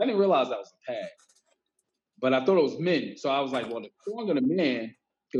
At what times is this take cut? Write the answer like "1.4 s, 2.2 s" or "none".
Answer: none